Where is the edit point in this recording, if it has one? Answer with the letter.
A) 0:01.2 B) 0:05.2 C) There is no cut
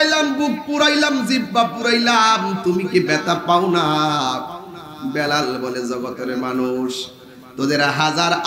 C